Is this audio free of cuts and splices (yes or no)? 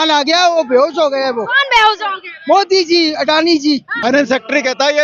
no